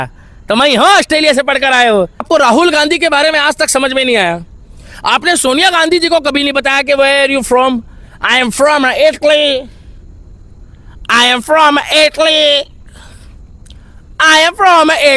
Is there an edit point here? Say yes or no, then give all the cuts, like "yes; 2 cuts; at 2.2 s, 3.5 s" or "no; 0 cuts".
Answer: yes; 1 cut; at 2.3 s